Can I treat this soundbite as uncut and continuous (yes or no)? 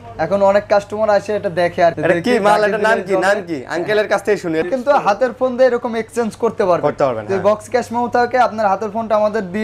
no